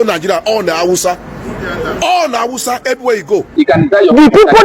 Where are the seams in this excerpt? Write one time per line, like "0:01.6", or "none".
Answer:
0:03.5